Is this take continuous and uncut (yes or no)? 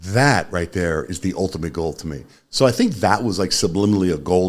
yes